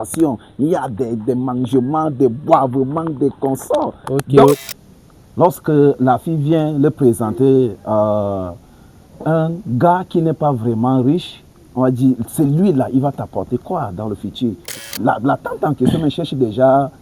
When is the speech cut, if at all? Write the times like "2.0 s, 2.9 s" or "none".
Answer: 4.6 s, 14.8 s